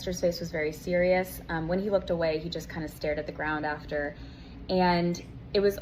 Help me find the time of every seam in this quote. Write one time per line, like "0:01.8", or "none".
none